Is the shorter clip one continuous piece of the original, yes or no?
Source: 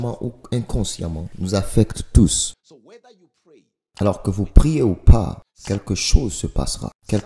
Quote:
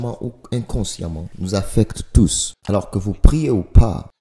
no